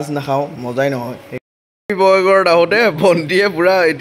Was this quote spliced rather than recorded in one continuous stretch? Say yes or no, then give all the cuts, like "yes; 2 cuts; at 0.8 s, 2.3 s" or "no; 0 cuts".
yes; 1 cut; at 1.3 s